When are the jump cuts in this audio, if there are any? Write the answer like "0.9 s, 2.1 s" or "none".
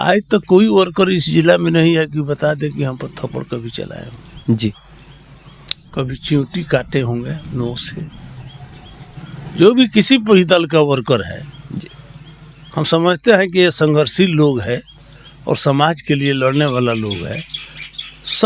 none